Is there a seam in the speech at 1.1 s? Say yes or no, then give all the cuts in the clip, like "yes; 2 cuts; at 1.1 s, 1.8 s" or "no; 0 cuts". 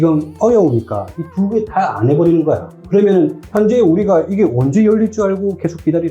no; 1 cut; at 2.7 s